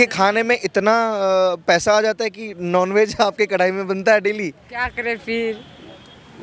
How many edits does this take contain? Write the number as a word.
zero